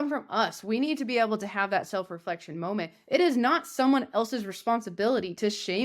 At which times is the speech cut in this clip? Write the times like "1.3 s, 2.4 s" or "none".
none